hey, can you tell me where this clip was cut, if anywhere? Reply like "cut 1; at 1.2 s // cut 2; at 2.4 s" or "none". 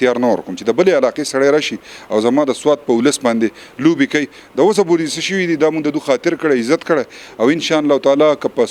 none